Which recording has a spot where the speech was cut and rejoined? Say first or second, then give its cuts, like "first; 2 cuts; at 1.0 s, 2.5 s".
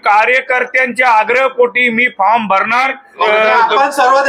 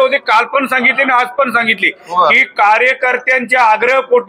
first; 1 cut; at 3.0 s